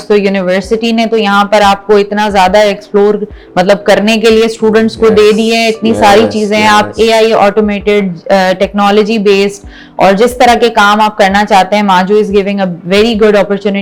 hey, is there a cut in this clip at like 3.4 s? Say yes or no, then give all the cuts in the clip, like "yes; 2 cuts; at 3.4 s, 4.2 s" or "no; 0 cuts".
no; 0 cuts